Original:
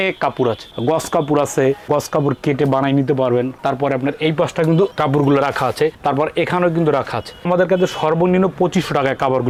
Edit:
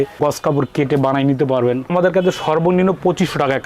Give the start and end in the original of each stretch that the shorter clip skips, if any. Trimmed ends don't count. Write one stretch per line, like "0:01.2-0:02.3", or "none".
0:03.5-0:07.4